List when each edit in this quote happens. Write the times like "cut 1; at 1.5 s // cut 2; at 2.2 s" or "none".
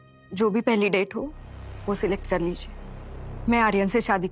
none

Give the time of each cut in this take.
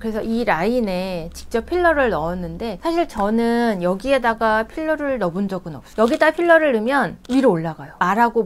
cut 1; at 2.7 s // cut 2; at 5.8 s

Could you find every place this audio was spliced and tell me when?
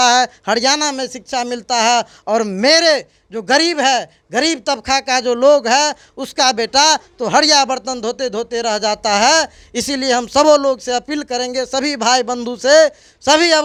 none

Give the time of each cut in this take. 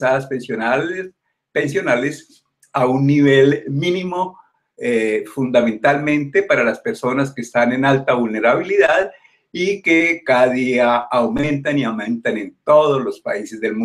none

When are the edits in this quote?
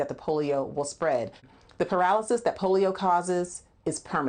cut 1; at 1.4 s

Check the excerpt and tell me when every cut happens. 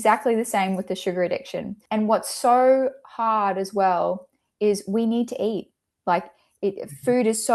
cut 1; at 1.8 s

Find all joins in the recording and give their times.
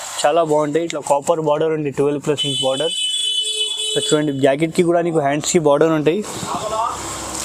none

